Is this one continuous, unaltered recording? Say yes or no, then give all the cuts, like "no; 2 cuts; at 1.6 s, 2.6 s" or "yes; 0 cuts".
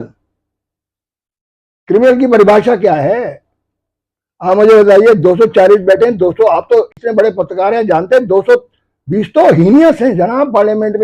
yes; 0 cuts